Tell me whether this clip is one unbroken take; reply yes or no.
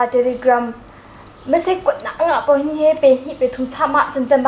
yes